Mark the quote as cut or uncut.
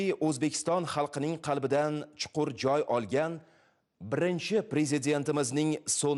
uncut